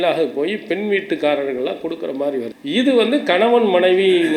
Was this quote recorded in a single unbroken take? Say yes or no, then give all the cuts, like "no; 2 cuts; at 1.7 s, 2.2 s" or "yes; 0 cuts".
no; 1 cut; at 2.6 s